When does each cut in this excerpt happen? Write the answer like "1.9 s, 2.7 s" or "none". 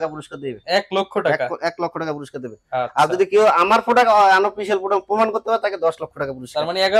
none

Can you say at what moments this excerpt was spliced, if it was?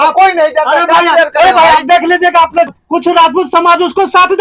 2.7 s

